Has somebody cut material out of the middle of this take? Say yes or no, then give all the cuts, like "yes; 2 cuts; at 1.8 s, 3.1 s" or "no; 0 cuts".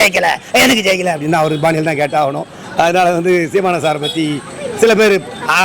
no; 0 cuts